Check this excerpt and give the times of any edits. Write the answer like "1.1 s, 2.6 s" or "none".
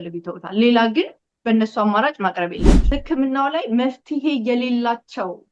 2.9 s